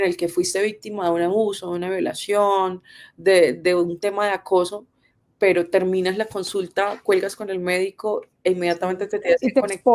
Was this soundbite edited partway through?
no; 0 cuts

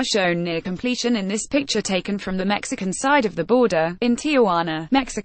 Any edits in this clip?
yes; 1 cut; at 1.1 s

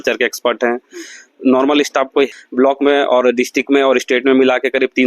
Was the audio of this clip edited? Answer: yes; 1 cut; at 2.4 s

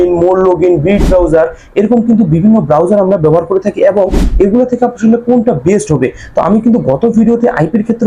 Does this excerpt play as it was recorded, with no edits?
yes; 0 cuts

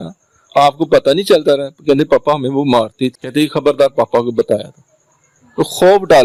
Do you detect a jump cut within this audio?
no; 0 cuts

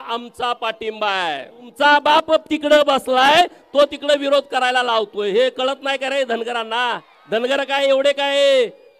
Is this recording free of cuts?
no; 2 cuts; at 1.7 s, 7.1 s

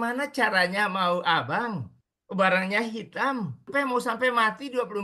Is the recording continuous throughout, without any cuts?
no; 1 cut; at 3.7 s

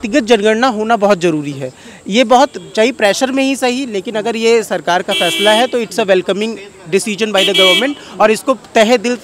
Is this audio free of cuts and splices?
yes; 0 cuts

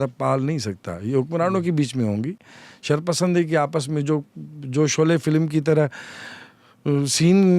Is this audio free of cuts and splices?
yes; 0 cuts

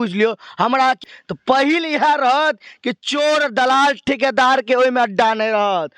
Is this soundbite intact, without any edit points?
no; 1 cut; at 1.1 s

